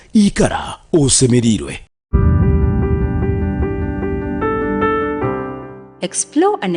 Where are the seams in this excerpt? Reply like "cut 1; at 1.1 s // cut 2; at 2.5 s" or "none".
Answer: cut 1; at 2.1 s